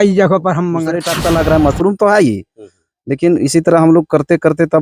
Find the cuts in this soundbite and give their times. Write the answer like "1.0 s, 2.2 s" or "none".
1.0 s